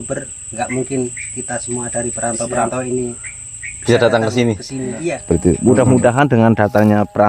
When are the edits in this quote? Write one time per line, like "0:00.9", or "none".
0:05.4